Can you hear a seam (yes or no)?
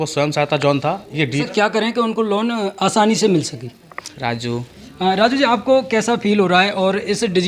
yes